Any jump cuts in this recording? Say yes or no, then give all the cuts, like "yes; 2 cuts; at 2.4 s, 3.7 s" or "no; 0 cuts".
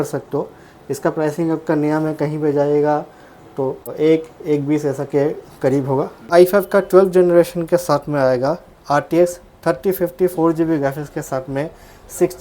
yes; 2 cuts; at 3.9 s, 6.3 s